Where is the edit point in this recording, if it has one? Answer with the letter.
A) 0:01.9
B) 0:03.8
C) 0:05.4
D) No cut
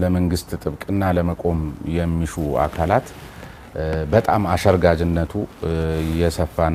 D